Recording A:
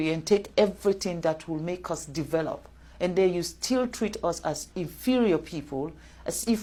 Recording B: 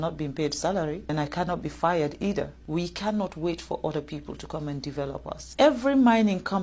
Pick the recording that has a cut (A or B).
B